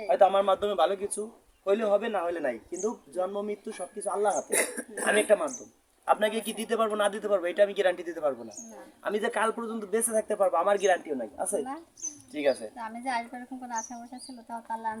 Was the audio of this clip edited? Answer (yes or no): no